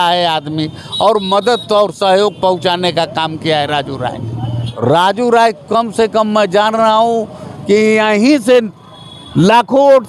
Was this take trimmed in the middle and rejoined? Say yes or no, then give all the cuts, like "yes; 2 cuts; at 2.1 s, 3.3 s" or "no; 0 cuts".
yes; 1 cut; at 4.7 s